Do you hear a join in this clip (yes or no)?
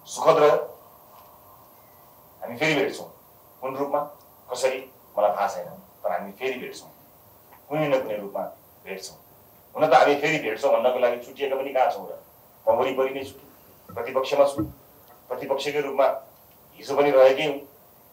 no